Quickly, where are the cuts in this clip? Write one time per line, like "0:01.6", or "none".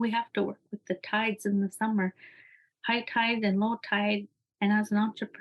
0:04.2

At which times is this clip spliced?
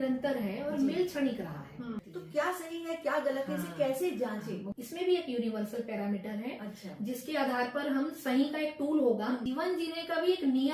0:02.0
0:04.7
0:09.4

